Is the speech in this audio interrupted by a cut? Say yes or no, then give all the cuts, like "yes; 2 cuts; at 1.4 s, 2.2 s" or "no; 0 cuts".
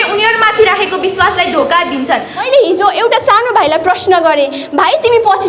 yes; 1 cut; at 2.4 s